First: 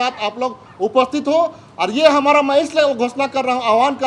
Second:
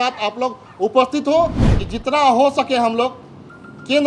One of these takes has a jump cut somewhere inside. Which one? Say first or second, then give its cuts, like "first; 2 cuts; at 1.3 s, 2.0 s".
second; 1 cut; at 1.6 s